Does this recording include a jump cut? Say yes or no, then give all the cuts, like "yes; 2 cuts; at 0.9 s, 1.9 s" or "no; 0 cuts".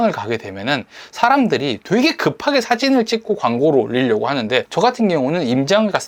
no; 0 cuts